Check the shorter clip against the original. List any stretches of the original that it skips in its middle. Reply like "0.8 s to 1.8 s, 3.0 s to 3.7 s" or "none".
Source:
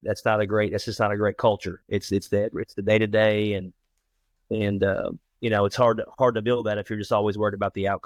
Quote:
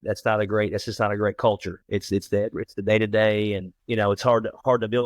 3.7 s to 5.3 s

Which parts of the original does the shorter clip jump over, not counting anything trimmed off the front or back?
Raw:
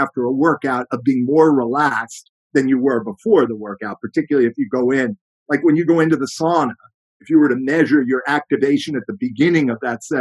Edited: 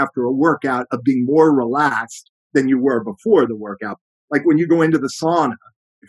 4.0 s to 5.2 s

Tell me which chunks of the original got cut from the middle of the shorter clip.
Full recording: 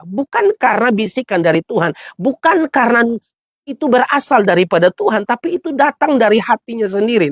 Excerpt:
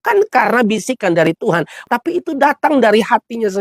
2.1 s to 5.2 s

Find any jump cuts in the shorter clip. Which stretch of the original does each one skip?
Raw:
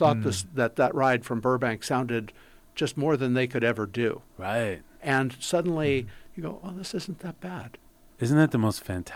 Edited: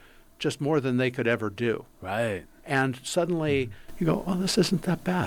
none

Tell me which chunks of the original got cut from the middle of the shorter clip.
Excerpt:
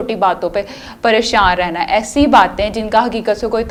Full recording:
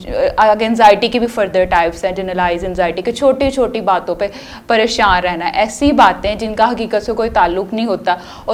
none

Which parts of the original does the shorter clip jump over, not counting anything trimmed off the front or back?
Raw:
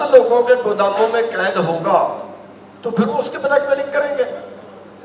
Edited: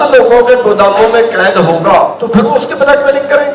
2.2 s to 2.8 s

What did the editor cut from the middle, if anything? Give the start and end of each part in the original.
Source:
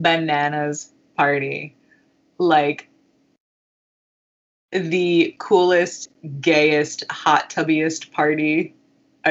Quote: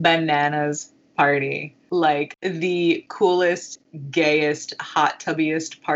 1.7 s to 2.2 s, 2.8 s to 4.6 s

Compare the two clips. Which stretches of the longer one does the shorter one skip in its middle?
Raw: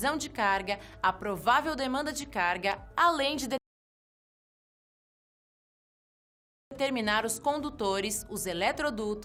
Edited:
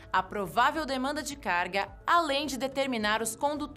3.6 s to 6.8 s

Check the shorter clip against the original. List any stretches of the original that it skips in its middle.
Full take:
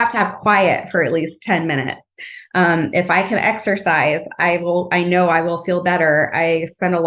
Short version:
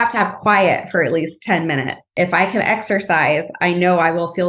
2.1 s to 2.9 s, 4.3 s to 4.9 s

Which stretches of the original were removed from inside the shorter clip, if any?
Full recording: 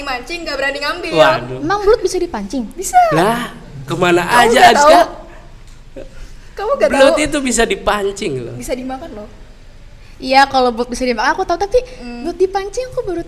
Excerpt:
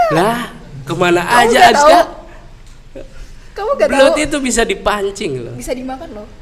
none

